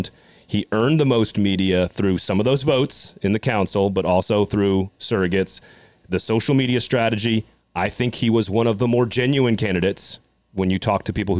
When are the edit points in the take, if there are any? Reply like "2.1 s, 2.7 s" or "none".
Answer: none